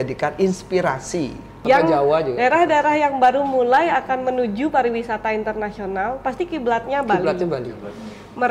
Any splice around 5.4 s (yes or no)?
no